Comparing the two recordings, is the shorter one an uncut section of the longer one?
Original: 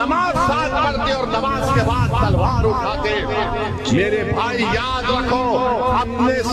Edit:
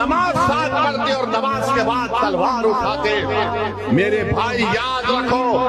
yes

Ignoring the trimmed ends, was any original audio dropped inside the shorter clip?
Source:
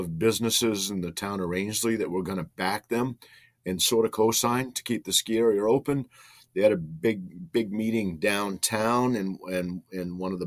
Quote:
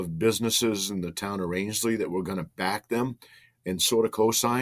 no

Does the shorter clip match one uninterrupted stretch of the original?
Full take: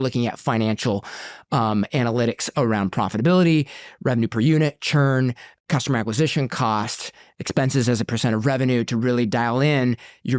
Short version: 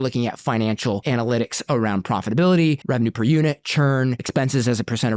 no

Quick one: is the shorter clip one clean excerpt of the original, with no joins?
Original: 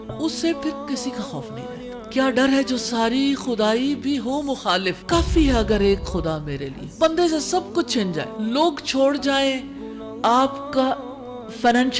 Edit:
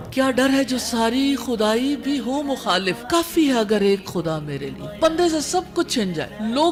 yes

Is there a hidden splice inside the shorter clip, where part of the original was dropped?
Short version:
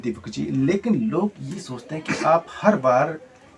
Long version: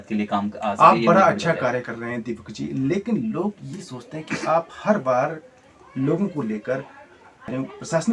no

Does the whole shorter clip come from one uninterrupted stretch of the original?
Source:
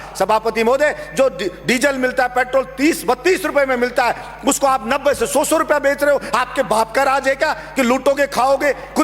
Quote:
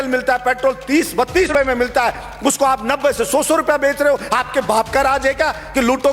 no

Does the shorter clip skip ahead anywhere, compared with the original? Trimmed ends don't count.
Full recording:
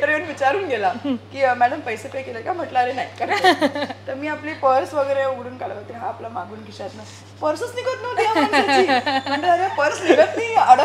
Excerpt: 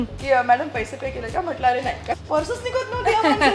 yes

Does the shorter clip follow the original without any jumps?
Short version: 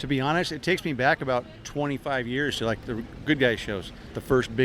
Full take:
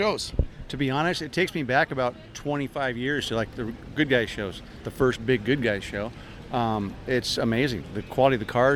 yes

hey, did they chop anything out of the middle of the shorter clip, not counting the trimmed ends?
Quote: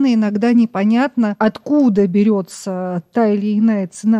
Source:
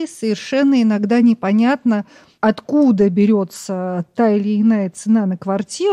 yes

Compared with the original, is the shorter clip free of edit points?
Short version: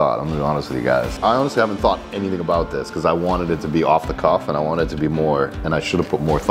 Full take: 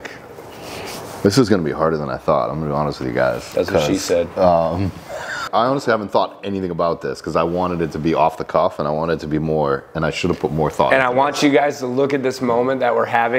no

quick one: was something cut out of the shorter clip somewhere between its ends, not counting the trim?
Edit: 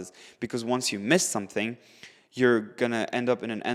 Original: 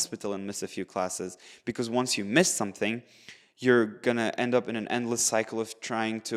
no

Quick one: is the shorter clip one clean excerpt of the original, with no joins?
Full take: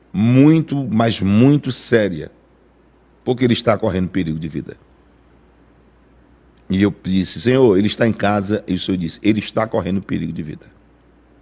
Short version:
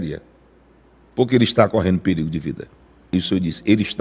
no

